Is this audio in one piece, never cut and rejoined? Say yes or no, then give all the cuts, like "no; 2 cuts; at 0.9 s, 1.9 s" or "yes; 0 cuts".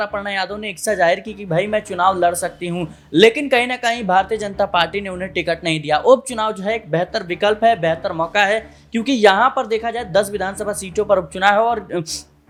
yes; 0 cuts